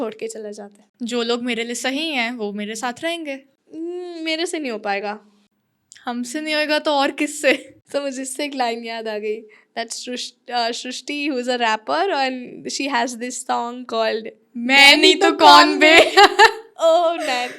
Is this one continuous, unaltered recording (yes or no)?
yes